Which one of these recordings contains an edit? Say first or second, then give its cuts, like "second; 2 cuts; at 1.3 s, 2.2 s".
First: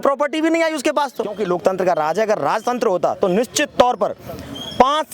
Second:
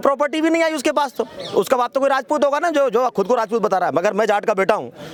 first; 1 cut; at 1.4 s